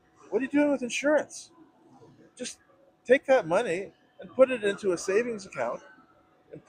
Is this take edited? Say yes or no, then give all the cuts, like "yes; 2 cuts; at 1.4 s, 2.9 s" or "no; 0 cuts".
no; 0 cuts